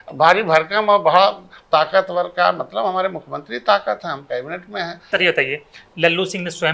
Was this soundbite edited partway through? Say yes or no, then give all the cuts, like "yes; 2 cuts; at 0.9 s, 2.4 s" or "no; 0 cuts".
yes; 1 cut; at 5.1 s